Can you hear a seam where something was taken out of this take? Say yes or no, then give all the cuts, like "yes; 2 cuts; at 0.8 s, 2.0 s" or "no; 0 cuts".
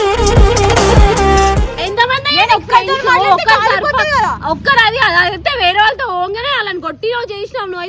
no; 0 cuts